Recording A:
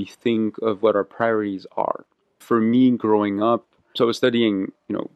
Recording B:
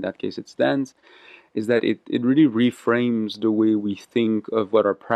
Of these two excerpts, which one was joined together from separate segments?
A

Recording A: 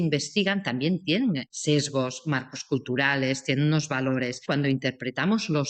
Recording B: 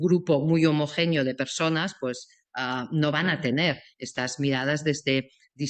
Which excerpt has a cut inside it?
A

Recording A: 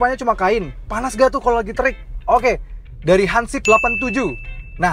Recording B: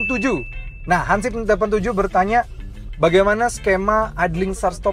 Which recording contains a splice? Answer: A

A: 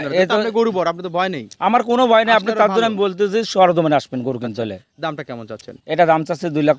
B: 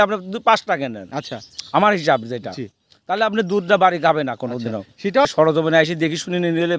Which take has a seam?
B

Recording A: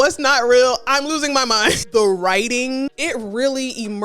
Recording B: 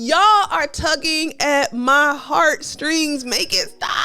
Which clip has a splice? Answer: A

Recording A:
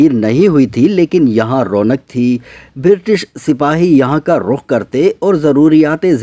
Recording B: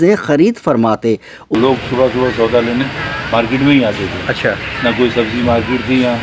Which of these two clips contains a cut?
B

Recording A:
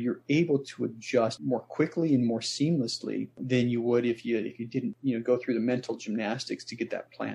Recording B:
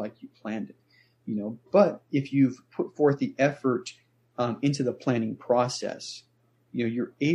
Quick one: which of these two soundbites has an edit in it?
A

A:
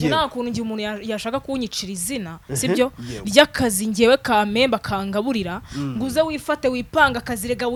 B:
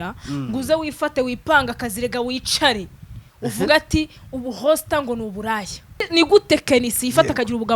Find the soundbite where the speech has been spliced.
B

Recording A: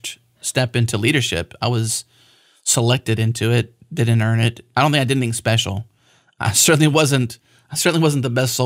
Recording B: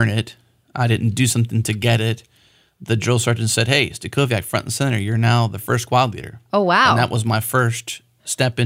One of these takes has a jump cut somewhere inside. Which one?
A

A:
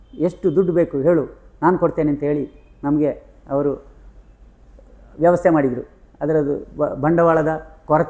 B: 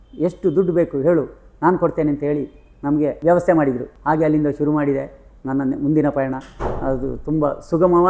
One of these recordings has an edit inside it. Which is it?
B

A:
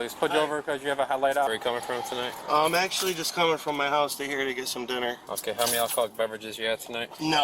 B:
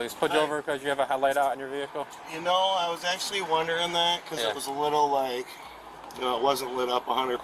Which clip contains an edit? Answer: A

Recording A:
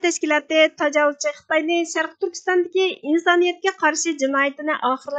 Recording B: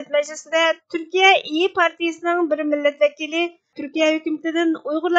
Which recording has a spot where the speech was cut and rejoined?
B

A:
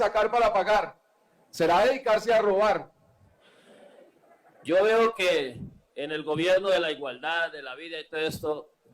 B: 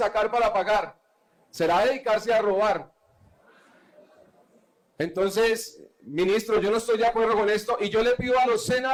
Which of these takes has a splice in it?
A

